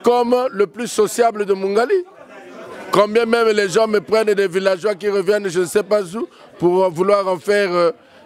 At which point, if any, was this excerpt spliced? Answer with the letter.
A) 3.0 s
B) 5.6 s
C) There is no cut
C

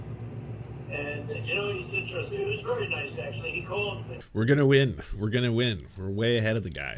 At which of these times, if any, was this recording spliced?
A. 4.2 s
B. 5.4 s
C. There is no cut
A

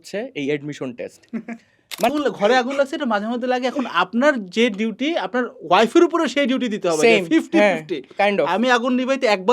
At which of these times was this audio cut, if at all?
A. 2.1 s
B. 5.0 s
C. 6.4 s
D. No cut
A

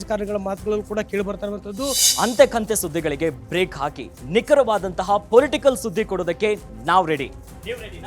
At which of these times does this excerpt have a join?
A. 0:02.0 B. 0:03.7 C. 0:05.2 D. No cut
A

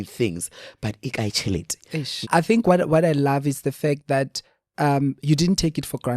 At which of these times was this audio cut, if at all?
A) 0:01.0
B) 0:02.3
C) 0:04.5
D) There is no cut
B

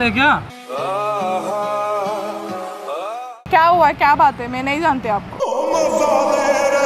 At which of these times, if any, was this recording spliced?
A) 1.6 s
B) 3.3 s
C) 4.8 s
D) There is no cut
B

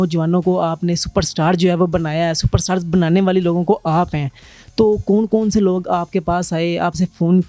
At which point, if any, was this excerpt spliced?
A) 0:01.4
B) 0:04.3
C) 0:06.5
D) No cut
D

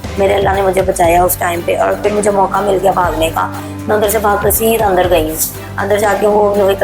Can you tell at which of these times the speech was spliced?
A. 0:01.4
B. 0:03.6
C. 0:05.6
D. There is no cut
D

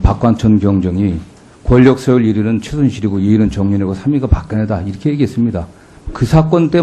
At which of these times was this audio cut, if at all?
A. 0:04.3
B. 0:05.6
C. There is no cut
A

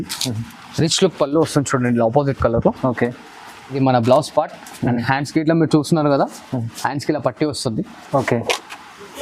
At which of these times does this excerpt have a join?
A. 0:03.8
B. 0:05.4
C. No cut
A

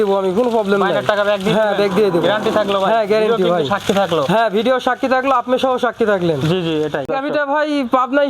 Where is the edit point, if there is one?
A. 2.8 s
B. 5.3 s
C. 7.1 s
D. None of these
C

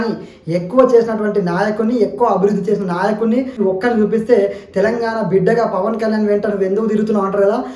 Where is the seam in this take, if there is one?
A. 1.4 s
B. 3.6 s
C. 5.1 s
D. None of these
B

